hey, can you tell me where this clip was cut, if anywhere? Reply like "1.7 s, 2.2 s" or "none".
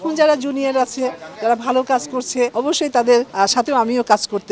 2.5 s, 3.3 s